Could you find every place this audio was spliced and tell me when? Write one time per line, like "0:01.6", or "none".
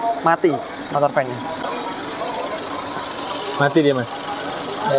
none